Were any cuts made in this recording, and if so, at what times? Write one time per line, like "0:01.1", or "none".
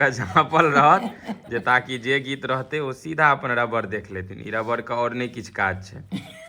none